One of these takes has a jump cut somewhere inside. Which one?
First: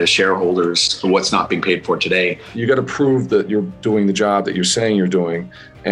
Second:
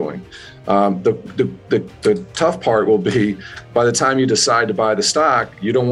first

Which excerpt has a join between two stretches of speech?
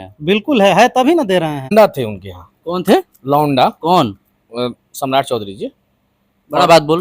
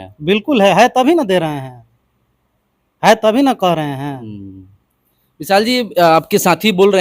first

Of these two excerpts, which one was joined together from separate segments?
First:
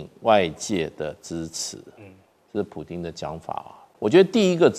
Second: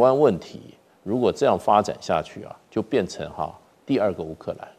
first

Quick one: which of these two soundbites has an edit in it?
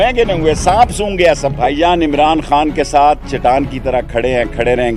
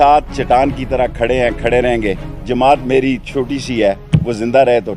first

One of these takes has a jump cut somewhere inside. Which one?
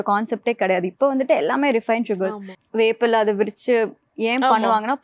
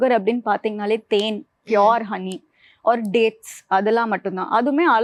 first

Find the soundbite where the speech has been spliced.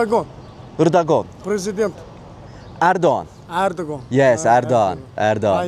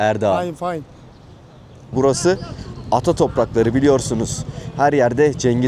second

